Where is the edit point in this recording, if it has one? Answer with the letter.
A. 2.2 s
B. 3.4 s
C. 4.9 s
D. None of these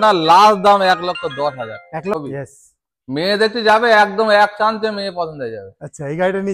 A